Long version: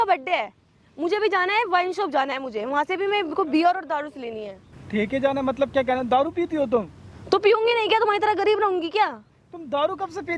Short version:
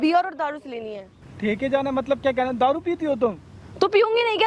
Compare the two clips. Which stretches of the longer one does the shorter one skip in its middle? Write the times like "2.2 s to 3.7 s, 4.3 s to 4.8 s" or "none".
none